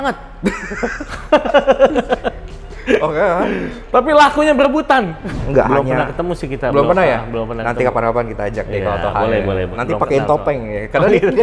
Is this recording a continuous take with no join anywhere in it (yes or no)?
no